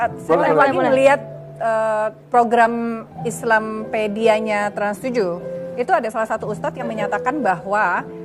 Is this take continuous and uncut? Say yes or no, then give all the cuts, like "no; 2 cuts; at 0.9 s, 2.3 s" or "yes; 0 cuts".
yes; 0 cuts